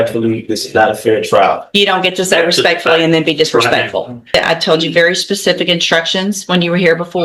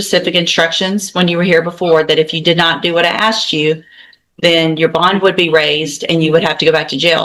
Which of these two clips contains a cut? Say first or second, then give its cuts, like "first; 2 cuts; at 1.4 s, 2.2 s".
first; 1 cut; at 4.3 s